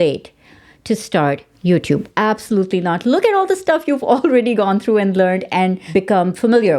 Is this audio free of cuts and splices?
no; 2 cuts; at 2.1 s, 5.9 s

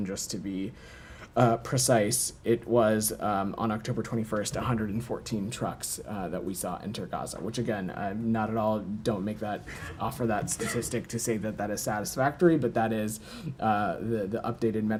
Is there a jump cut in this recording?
no; 0 cuts

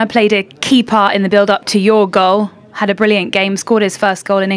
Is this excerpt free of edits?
yes; 0 cuts

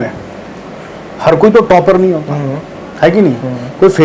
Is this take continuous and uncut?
yes; 0 cuts

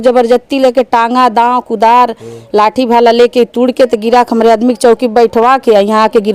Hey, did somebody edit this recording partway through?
no; 0 cuts

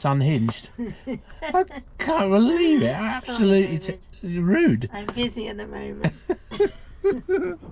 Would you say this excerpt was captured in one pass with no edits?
yes; 0 cuts

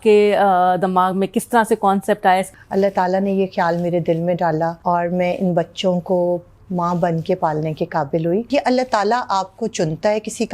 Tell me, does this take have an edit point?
yes; 3 cuts; at 2.5 s, 4.8 s, 8.5 s

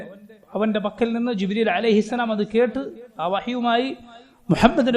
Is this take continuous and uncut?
yes; 0 cuts

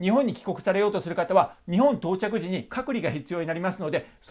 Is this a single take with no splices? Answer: no; 1 cut; at 2.7 s

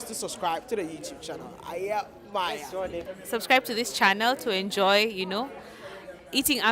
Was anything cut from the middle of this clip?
yes; 1 cut; at 3.0 s

